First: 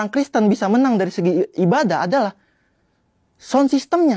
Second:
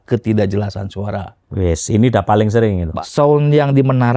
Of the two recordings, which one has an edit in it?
second; 1 cut; at 2.9 s

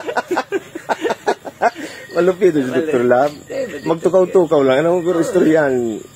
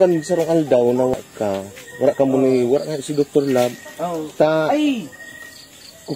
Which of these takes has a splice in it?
second; 1 cut; at 1.1 s

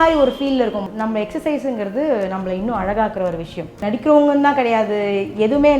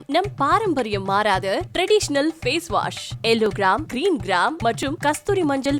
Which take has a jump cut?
first; 2 cuts; at 0.8 s, 3.8 s

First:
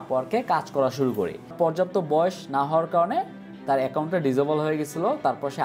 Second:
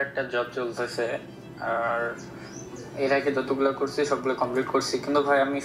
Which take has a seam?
first; 1 cut; at 1.5 s

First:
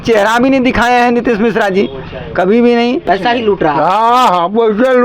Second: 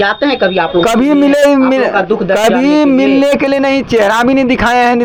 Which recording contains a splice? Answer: first; 1 cut; at 3.1 s

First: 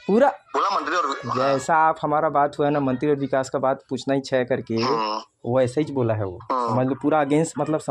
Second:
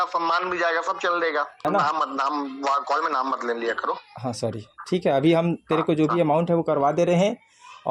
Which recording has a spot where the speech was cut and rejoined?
second; 1 cut; at 1.6 s

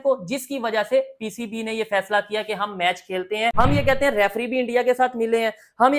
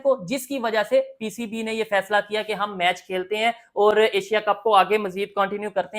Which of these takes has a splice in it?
first; 1 cut; at 3.5 s

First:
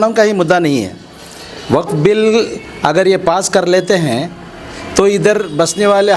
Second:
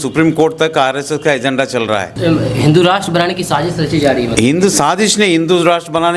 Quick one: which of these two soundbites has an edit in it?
second; 1 cut; at 2.1 s

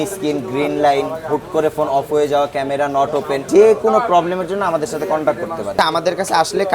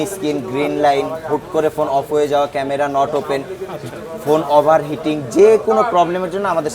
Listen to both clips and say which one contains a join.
first; 2 cuts; at 3.4 s, 5.7 s

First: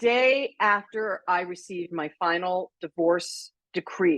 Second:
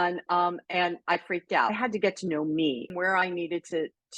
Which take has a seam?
second; 2 cuts; at 1.7 s, 2.9 s

